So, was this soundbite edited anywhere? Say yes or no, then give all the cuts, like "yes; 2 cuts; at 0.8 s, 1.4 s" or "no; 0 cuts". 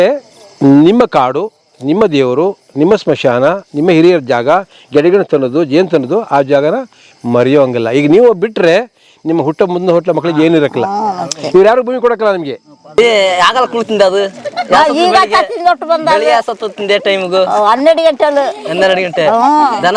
yes; 1 cut; at 13.0 s